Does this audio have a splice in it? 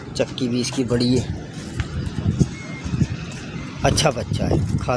no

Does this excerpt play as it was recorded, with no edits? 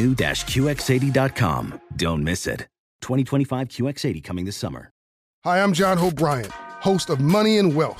no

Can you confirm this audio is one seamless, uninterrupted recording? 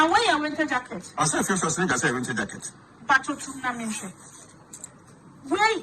no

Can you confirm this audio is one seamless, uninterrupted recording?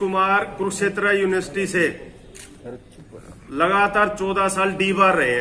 yes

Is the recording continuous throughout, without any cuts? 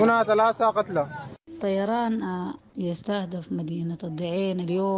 no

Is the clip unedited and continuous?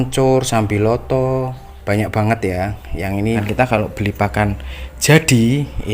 no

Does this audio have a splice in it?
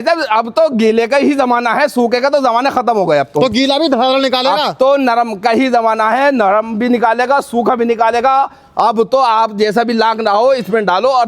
no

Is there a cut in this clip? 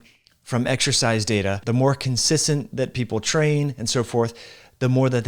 yes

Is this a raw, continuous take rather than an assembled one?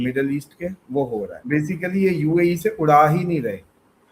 no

